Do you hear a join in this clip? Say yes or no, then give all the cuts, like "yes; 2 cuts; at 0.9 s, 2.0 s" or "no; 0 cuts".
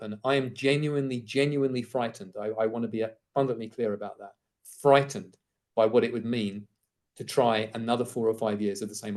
no; 0 cuts